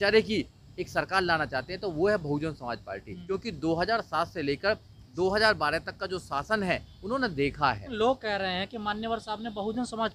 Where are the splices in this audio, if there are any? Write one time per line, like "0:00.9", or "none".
0:03.1
0:07.9